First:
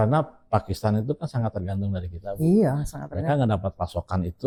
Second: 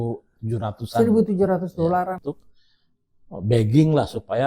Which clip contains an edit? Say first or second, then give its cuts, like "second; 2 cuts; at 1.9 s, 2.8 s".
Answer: second; 1 cut; at 2.2 s